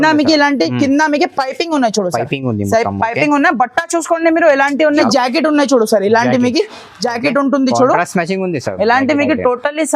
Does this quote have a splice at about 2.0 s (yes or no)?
no